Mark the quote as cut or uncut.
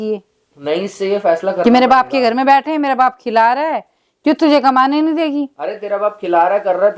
uncut